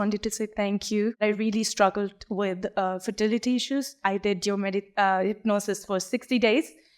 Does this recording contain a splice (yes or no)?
yes